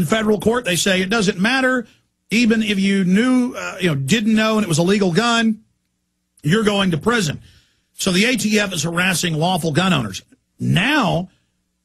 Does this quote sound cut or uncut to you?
cut